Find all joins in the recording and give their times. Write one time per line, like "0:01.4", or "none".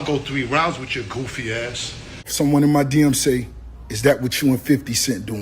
0:02.3